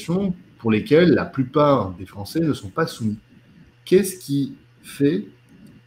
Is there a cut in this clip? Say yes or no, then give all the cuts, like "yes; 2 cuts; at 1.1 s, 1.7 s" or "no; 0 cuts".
no; 0 cuts